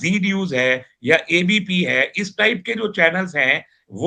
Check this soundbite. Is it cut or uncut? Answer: uncut